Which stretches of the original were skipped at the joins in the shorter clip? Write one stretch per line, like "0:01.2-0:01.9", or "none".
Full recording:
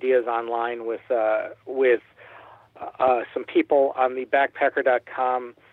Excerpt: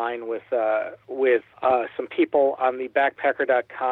0:02.1-0:02.9